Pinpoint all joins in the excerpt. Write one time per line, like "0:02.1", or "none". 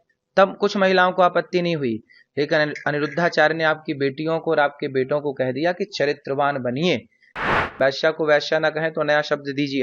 0:07.5